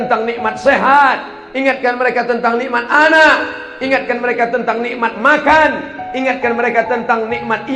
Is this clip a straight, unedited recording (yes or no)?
yes